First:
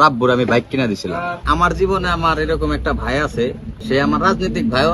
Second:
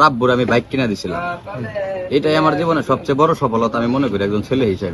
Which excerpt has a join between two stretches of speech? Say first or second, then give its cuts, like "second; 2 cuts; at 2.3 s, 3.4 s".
first; 2 cuts; at 1.4 s, 3.8 s